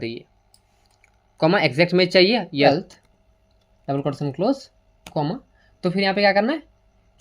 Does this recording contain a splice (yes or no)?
yes